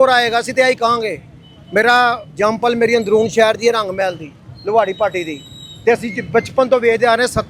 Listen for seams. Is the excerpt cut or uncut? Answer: uncut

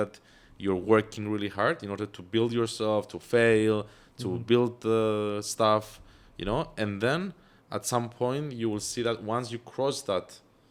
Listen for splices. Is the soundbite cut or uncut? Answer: uncut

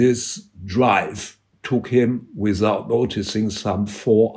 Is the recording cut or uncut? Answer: uncut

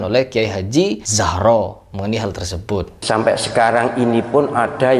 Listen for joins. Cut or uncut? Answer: cut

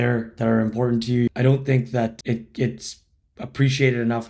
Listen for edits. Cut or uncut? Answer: cut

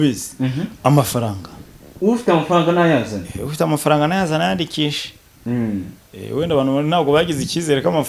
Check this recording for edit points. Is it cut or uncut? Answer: uncut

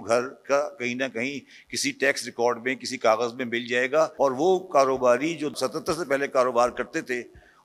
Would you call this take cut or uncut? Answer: cut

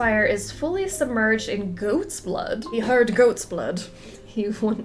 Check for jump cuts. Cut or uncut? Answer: cut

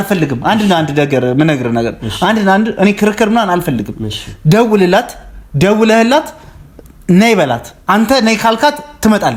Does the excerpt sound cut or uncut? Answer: uncut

